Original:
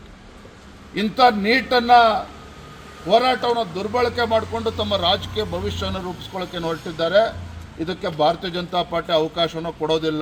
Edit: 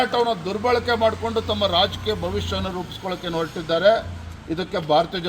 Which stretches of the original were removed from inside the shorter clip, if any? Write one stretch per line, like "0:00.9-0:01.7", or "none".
none

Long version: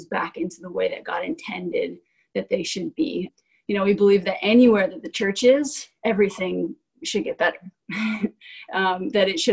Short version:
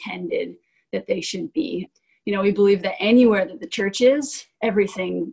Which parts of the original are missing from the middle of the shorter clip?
none

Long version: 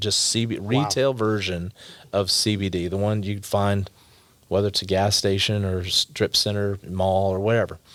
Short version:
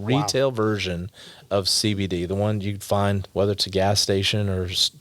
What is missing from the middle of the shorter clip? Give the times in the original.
0:03.9-0:04.4

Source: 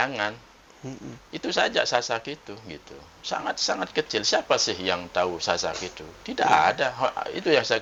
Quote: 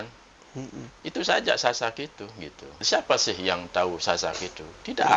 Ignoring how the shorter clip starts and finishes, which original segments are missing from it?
0:03.1-0:04.2

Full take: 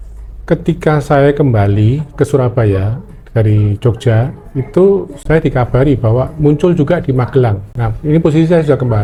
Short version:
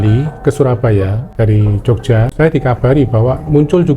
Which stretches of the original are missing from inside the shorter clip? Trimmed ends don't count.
0:03.0-0:03.2
0:04.3-0:05.2

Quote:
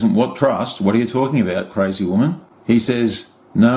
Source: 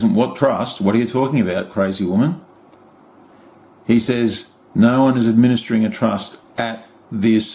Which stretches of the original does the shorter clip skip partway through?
0:02.5-0:03.7

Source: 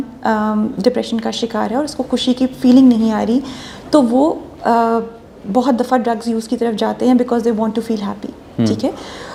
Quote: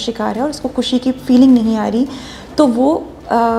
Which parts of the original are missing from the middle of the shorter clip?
none

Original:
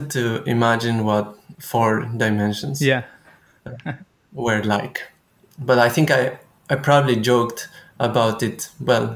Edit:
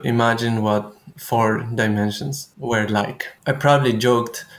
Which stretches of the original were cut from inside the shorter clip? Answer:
0:02.7-0:04.0
0:05.0-0:06.5

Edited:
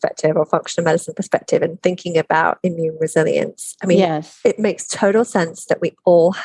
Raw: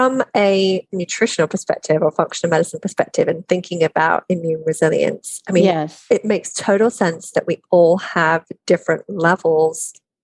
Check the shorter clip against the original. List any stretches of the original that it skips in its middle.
none

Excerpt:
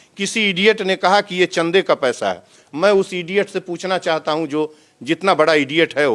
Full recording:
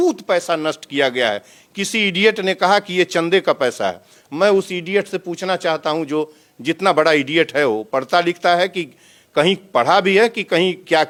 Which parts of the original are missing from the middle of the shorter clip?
none

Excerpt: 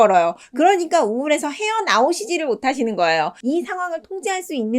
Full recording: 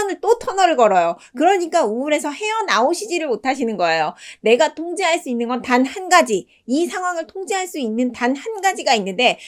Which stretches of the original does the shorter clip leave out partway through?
0:04.2-0:06.6

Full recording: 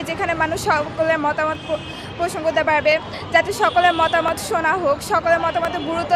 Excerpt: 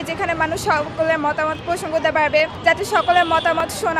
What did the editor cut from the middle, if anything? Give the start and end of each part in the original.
0:01.6-0:02.1
0:03.1-0:03.2

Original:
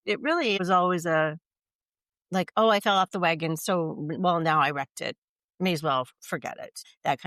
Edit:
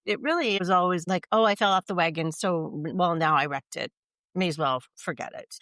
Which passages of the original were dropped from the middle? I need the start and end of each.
0:01.0-0:02.3

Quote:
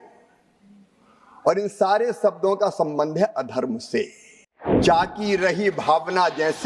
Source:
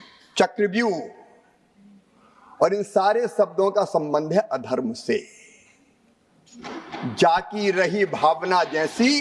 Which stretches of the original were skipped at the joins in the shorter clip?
0:05.9-0:07.1

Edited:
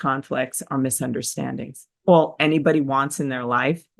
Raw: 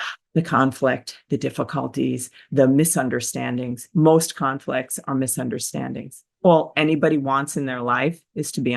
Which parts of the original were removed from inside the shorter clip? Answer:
none

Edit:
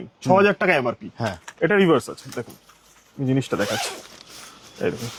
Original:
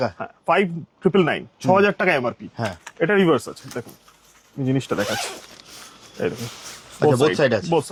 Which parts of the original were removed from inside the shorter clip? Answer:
none

